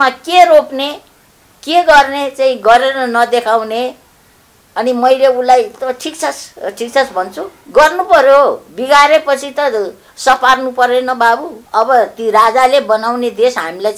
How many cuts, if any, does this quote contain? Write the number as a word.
two